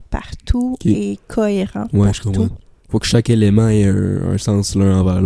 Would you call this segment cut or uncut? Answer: uncut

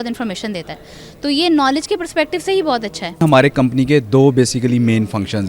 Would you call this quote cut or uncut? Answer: cut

